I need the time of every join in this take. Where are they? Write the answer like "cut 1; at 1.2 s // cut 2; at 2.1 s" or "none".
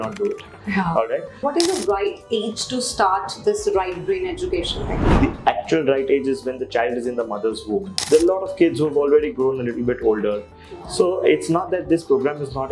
cut 1; at 1.4 s // cut 2; at 5.0 s // cut 3; at 8.0 s